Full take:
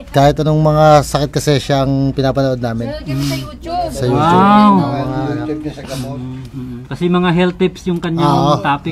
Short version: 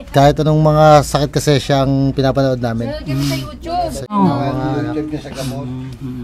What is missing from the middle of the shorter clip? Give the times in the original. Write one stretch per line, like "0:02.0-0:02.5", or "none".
0:04.2-0:04.7